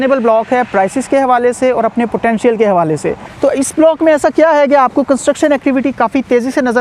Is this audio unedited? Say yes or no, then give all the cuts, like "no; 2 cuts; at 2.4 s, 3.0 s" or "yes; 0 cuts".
no; 1 cut; at 3.3 s